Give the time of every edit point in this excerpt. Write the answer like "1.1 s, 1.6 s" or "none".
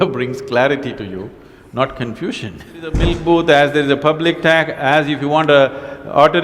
3.0 s